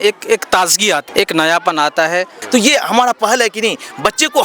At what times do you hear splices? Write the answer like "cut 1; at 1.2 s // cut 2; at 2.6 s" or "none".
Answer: cut 1; at 1.1 s // cut 2; at 2.4 s